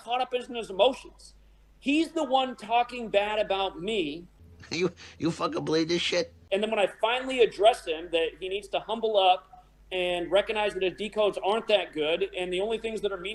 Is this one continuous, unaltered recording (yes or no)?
yes